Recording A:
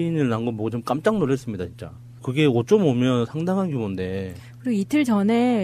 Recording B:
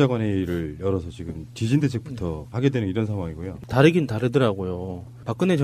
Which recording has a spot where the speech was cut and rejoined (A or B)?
A